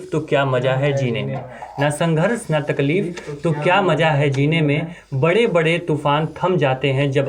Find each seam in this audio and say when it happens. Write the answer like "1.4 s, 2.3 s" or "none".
none